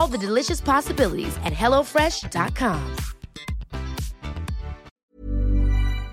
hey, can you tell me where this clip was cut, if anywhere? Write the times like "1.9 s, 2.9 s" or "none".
5.0 s